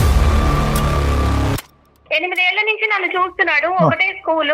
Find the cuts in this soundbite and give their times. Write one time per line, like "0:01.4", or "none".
0:02.1